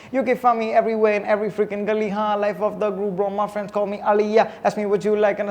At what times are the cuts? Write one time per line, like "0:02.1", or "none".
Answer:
none